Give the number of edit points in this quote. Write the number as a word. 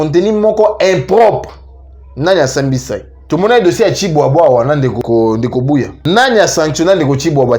three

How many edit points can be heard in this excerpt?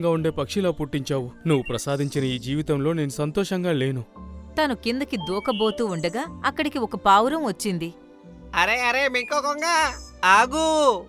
zero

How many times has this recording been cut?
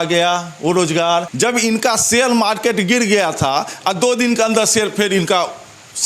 one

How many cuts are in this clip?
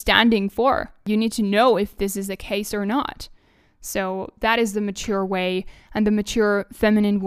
one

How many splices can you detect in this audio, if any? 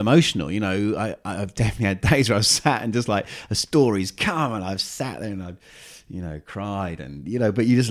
zero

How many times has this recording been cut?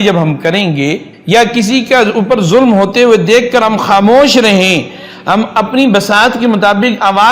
one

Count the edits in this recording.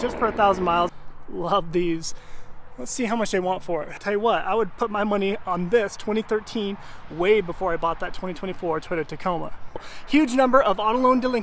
three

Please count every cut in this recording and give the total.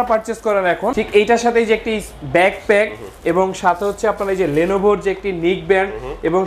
one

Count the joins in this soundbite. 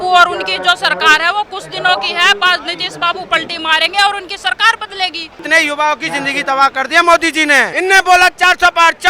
two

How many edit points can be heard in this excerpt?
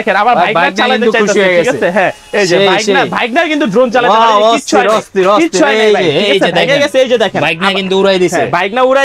zero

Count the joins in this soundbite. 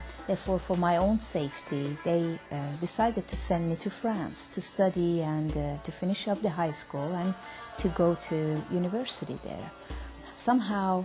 zero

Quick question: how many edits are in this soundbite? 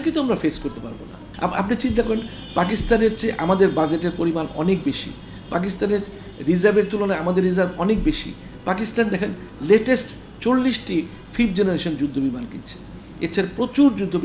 one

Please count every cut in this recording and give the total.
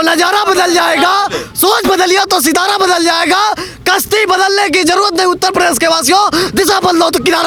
zero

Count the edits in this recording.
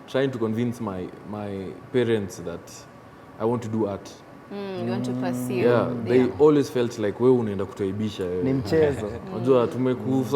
zero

